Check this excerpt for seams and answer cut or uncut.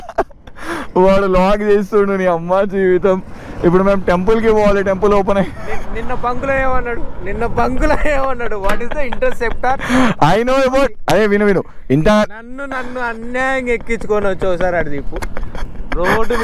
uncut